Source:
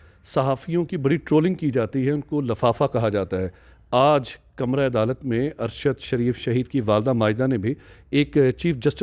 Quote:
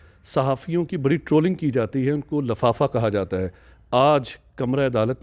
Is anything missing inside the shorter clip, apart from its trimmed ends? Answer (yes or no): no